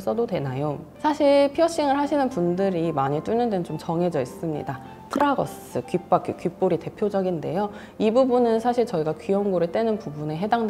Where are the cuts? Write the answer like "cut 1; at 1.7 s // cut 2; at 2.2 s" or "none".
none